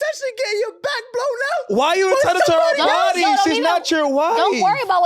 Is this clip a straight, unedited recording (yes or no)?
yes